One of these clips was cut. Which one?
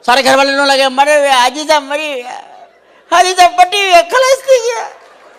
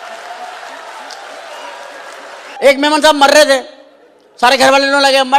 second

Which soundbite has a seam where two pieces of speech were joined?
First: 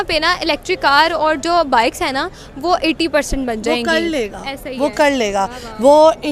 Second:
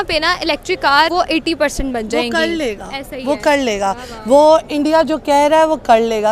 second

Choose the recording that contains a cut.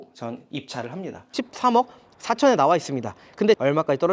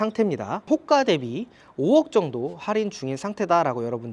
first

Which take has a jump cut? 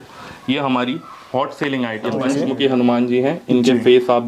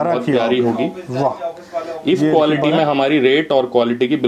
first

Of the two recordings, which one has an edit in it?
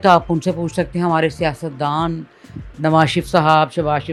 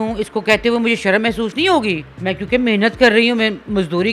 second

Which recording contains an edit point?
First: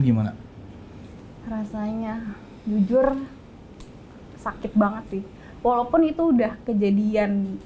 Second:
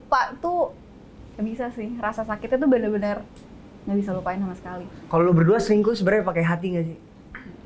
second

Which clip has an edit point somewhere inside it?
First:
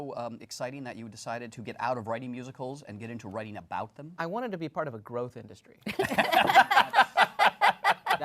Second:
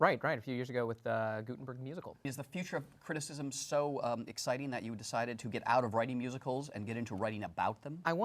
second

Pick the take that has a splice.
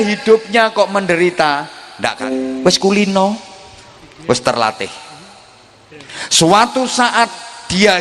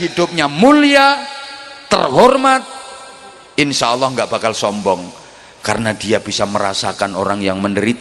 first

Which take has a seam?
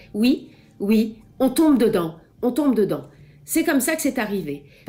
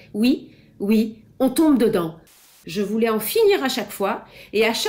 second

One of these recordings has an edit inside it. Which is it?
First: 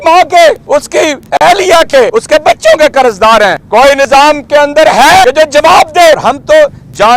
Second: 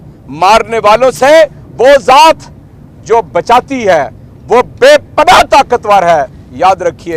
first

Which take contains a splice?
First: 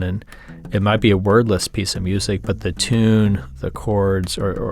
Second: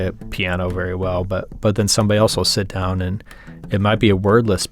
first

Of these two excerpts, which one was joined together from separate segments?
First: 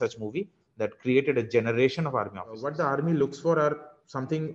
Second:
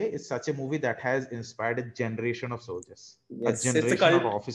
first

